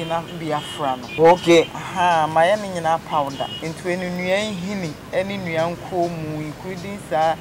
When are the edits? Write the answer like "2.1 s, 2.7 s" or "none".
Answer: 1.1 s, 3.5 s